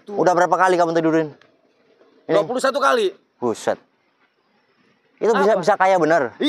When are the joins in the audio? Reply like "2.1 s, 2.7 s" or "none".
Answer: none